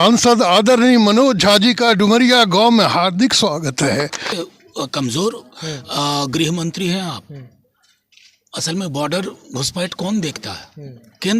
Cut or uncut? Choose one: cut